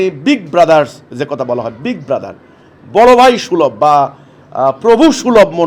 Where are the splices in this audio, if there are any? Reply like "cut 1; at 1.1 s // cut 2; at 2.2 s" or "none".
none